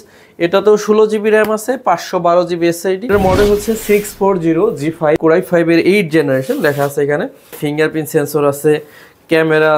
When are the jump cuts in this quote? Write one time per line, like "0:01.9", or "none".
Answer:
0:03.1
0:05.2
0:07.6